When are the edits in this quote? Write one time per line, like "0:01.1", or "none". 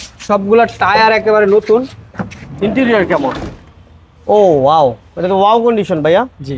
none

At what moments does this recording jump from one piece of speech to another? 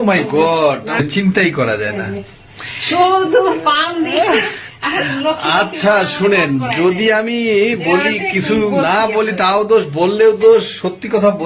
0:01.0

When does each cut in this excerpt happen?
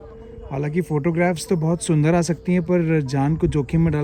none

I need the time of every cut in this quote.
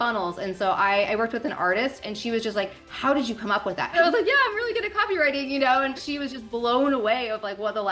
0:03.9
0:06.0

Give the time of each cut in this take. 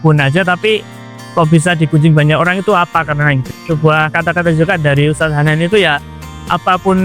0:03.5

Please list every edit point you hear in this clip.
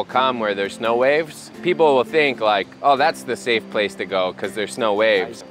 none

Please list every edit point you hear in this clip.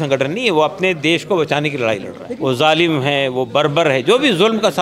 0:02.2

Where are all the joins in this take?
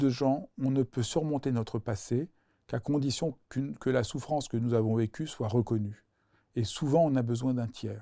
none

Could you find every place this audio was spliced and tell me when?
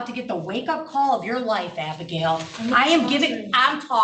none

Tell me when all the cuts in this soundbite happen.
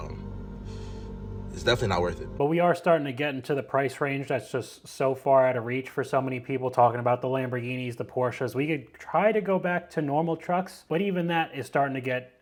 none

